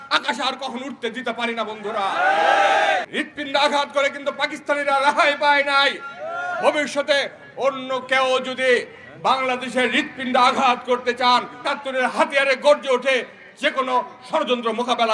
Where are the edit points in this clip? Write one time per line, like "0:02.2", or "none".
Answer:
0:03.1
0:11.6